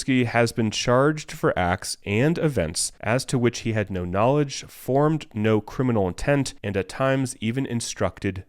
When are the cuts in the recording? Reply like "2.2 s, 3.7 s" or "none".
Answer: 2.9 s, 6.6 s